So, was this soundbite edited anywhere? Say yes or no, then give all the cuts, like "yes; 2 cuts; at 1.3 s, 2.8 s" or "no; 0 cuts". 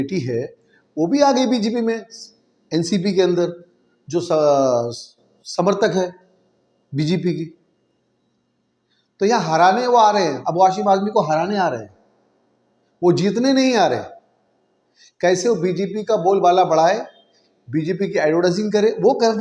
no; 0 cuts